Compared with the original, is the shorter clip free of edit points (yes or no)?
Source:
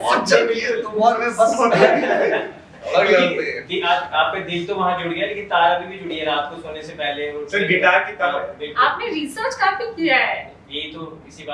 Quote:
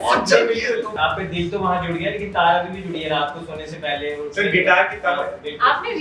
no